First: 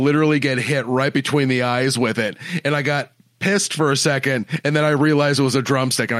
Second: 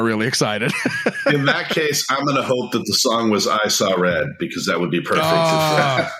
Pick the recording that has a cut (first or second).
second